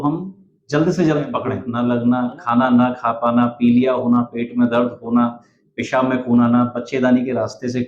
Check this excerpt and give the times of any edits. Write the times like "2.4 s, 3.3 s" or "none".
1.6 s

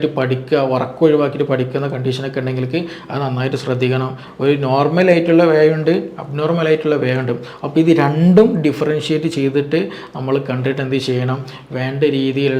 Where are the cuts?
4.3 s

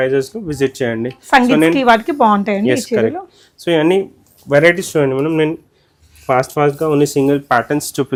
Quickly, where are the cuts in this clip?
none

